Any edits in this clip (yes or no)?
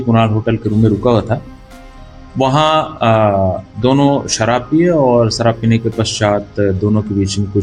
no